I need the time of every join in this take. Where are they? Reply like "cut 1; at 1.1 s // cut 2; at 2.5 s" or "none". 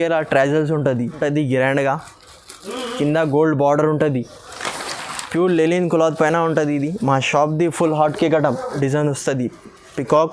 cut 1; at 1.2 s // cut 2; at 8.7 s